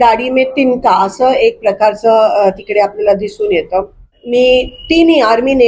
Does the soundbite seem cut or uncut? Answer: cut